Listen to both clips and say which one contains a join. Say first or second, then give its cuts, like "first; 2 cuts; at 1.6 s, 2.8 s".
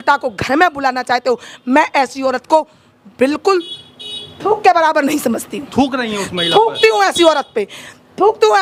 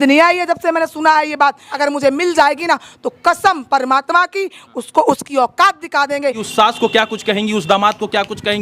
second; 2 cuts; at 1.7 s, 6.4 s